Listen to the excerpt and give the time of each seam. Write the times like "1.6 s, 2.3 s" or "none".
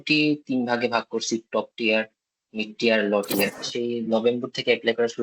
3.6 s